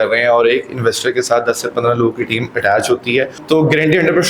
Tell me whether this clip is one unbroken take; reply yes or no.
no